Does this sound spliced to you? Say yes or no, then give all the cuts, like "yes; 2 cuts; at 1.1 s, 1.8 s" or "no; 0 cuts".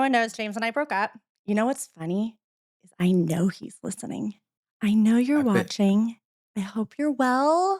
yes; 1 cut; at 1.3 s